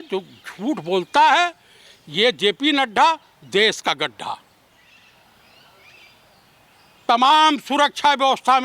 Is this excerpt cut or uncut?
cut